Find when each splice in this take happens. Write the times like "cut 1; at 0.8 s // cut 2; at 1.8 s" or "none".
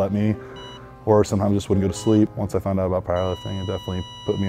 cut 1; at 2.4 s